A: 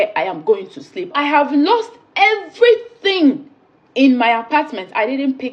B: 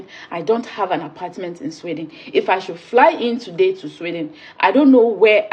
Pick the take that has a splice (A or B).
A